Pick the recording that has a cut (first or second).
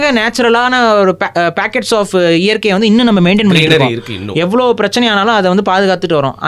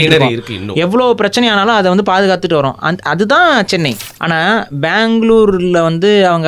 second